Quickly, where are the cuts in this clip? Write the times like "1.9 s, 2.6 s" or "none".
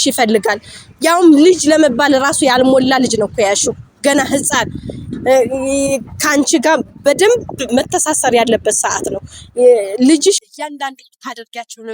10.4 s